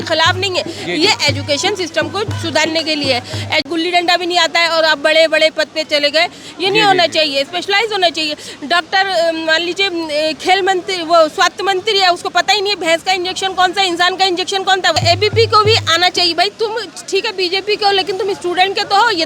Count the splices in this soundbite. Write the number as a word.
two